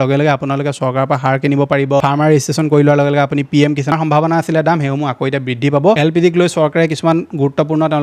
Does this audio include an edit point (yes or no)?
yes